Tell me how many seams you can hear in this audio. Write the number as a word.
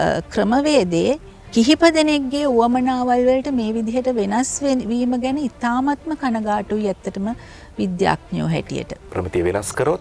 one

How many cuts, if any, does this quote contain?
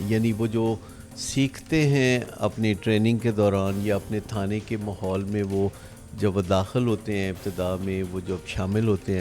zero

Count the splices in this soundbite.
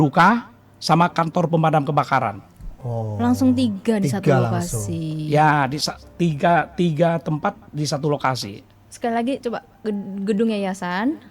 zero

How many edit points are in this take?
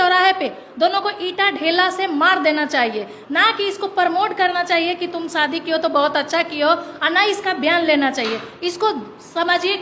zero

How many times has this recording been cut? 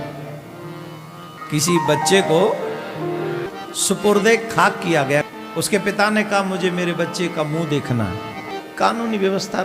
four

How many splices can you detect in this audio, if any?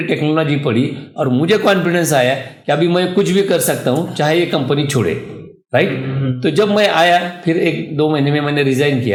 zero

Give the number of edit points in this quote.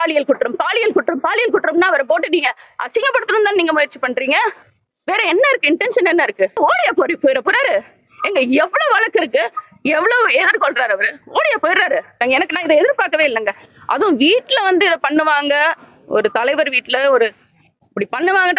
two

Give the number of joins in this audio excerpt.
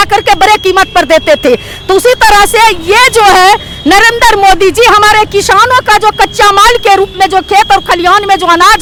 zero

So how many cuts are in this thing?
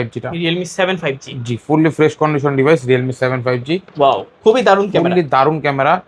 one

